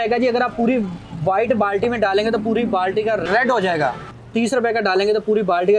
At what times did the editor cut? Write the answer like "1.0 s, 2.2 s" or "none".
3.2 s, 4.1 s